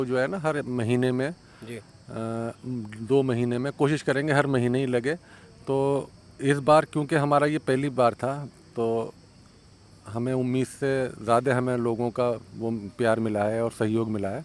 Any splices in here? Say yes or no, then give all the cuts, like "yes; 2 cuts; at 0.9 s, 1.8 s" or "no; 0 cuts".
no; 0 cuts